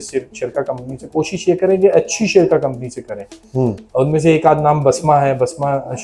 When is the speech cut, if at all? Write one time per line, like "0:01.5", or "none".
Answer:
none